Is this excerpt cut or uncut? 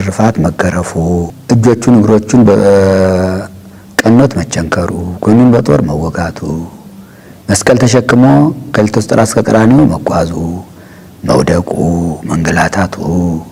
cut